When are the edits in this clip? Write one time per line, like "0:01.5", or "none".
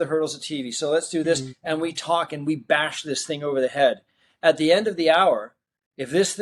none